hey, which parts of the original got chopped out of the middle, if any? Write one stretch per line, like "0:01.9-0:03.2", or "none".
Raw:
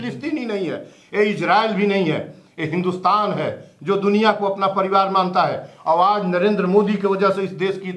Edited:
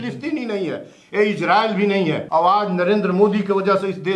0:02.2-0:05.8